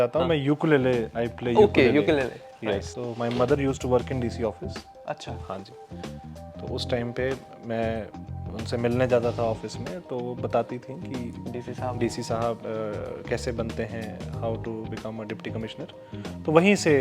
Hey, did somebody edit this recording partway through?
yes; 1 cut; at 3.0 s

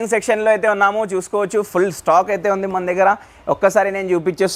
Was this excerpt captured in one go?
yes; 0 cuts

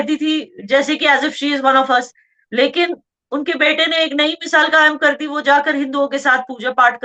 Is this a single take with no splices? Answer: yes; 0 cuts

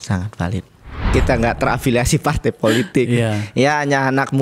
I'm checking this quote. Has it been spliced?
yes; 1 cut; at 1.0 s

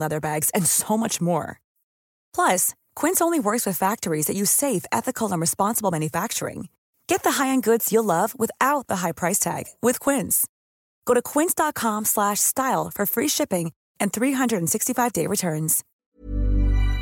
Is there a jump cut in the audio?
yes; 1 cut; at 15.9 s

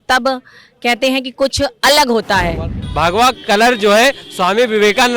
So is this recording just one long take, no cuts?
no; 1 cut; at 2.8 s

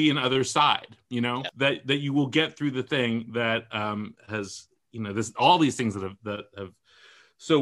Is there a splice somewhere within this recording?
yes; 1 cut; at 1.5 s

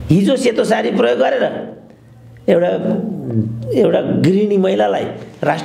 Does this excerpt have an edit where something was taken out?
no; 0 cuts

